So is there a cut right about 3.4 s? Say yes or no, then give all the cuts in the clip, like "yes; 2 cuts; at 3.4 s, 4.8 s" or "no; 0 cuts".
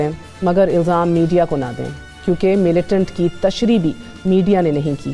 no; 0 cuts